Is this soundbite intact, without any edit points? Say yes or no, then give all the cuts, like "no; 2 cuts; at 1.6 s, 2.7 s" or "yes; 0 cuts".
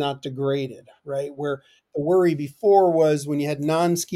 yes; 0 cuts